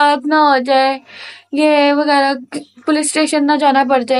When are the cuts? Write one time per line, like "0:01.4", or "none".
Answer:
none